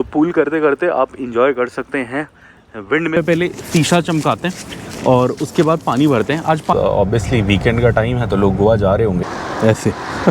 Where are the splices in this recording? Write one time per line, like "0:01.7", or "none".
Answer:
0:03.2
0:06.7
0:09.2